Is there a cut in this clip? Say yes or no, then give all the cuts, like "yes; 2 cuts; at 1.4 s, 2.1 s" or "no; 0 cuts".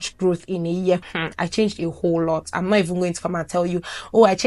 yes; 1 cut; at 1.0 s